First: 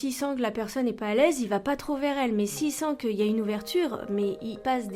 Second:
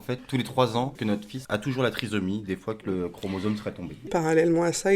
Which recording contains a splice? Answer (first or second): second